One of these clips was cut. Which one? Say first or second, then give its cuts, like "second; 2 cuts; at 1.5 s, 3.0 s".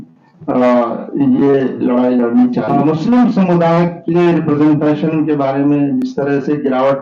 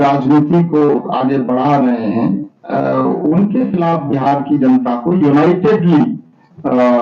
first; 1 cut; at 2.7 s